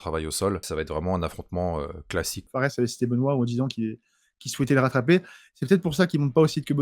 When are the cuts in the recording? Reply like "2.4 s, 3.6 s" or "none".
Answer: 2.4 s